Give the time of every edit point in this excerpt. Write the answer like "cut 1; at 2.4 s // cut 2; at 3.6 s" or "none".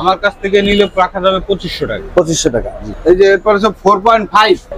none